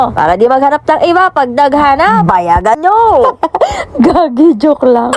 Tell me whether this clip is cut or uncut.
cut